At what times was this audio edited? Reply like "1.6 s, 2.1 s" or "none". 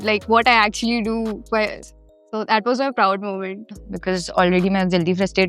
1.9 s, 3.7 s